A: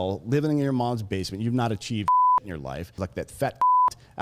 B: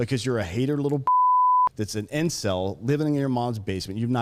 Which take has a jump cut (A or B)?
A